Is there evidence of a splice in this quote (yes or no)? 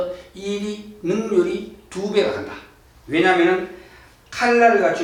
no